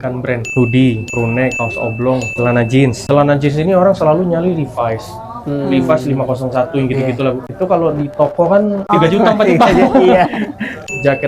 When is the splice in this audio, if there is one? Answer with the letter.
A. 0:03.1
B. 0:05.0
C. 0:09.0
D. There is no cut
D